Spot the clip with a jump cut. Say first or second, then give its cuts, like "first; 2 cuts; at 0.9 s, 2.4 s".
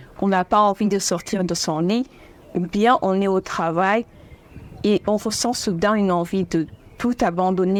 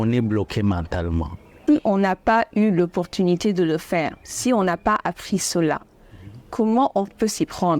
second; 1 cut; at 1.5 s